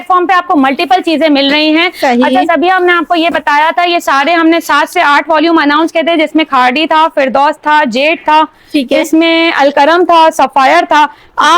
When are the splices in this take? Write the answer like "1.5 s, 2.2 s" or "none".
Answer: none